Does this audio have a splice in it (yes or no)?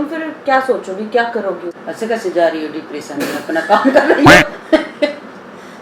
yes